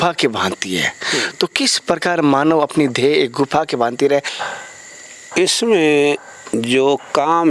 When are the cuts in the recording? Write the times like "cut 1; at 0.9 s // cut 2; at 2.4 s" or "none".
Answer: cut 1; at 4.4 s